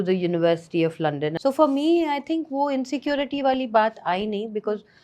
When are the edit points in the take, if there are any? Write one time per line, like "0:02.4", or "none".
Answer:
0:01.4